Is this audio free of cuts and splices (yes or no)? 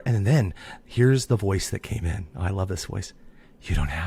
yes